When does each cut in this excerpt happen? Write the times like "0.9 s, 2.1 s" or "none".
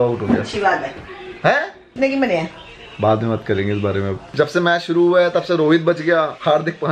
1.9 s, 4.3 s